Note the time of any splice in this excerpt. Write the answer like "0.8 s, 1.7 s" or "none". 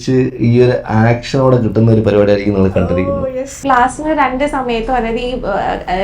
3.6 s